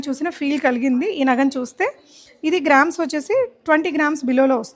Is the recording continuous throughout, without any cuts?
yes; 0 cuts

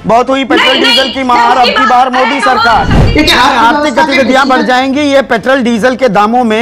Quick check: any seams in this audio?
yes; 1 cut; at 3.0 s

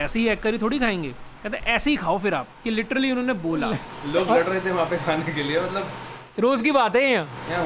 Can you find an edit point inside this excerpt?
yes; 1 cut; at 3.9 s

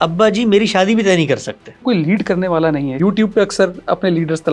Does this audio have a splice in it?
yes; 2 cuts; at 1.8 s, 3.0 s

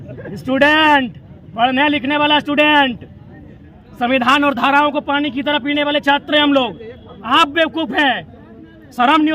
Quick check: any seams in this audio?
no; 0 cuts

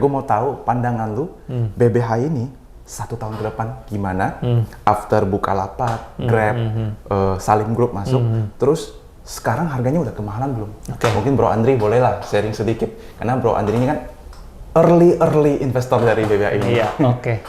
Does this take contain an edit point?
no; 0 cuts

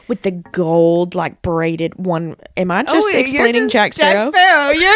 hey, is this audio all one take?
yes; 0 cuts

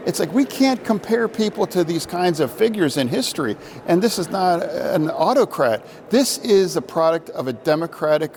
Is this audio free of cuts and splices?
yes; 0 cuts

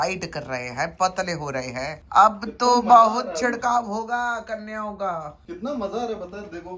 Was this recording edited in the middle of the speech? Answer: yes; 1 cut; at 2.0 s

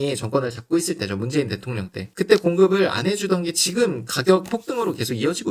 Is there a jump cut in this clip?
no; 0 cuts

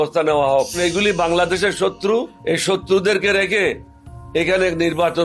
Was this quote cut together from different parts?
yes; 2 cuts; at 0.8 s, 2.3 s

